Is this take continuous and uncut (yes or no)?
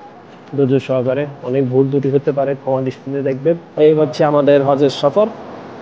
no